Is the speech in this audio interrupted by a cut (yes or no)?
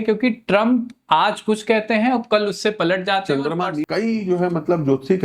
yes